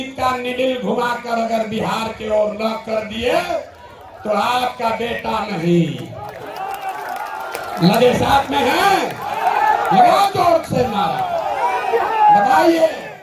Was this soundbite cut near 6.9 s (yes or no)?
no